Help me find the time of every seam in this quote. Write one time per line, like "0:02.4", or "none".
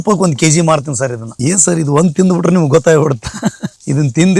0:01.3